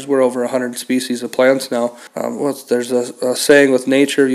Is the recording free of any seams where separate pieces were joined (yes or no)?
no